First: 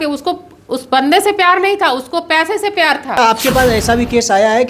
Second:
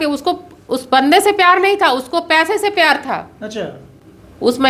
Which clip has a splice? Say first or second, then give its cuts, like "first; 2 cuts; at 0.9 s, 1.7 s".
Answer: first; 1 cut; at 3.2 s